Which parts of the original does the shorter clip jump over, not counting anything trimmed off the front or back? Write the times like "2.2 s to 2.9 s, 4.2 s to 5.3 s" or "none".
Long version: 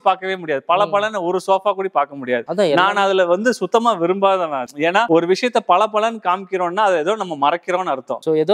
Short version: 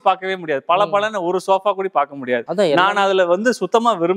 none